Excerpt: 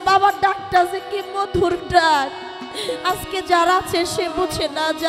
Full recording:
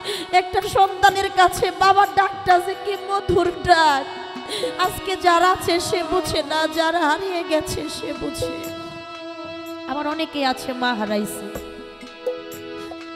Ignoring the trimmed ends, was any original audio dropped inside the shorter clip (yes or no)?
no